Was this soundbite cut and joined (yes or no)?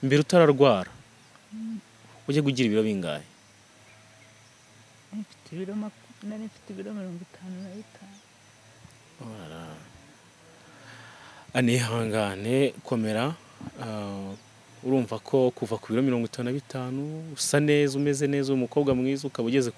no